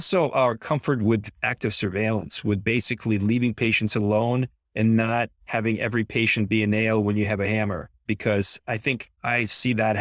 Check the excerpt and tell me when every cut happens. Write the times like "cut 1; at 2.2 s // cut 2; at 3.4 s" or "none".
cut 1; at 7.9 s